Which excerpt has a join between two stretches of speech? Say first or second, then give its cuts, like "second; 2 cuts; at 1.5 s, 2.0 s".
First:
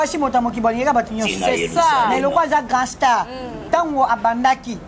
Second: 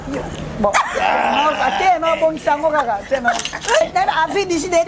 second; 1 cut; at 3.8 s